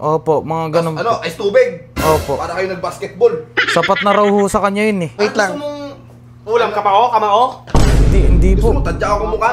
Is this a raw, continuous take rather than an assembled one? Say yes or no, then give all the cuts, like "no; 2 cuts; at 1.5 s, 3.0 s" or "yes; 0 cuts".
no; 1 cut; at 5.1 s